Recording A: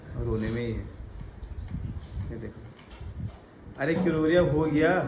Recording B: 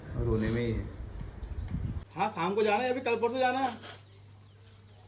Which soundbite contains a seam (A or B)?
B